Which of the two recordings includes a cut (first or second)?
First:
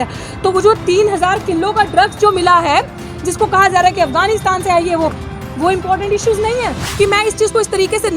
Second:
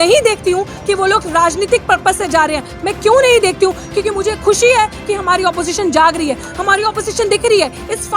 first